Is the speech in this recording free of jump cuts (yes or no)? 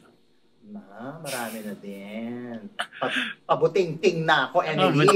yes